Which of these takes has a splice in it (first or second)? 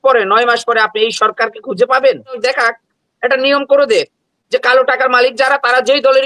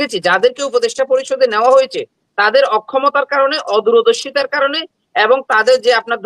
first